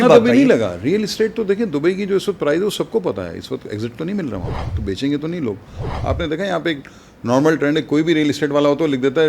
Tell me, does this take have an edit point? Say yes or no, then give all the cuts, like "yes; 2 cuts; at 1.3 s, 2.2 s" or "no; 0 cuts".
yes; 2 cuts; at 4.6 s, 5.9 s